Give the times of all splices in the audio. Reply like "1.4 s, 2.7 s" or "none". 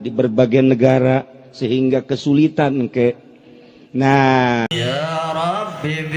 4.7 s

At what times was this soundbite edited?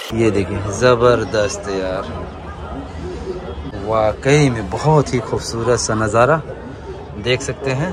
3.7 s

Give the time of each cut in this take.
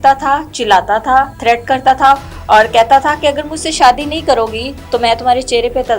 1.3 s

